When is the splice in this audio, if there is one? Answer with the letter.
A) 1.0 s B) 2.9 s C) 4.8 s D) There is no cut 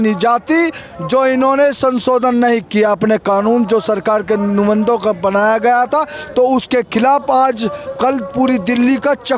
D